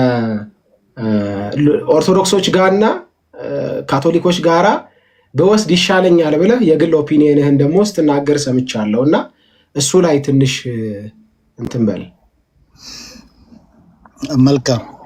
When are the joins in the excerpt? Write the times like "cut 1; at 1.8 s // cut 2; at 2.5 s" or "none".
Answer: none